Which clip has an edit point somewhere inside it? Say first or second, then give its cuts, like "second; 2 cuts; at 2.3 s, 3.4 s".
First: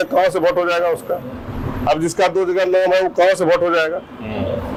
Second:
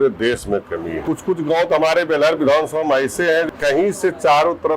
second; 2 cuts; at 1.0 s, 3.5 s